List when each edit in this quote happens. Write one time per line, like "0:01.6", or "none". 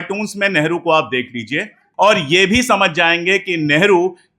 0:01.8